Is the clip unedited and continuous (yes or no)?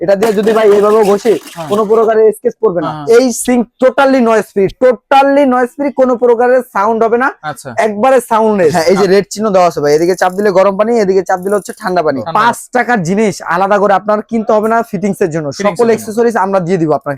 no